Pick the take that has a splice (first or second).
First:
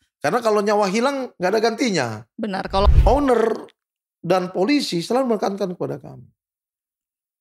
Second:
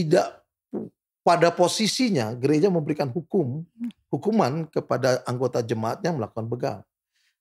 first